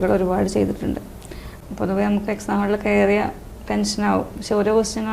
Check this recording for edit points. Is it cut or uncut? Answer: cut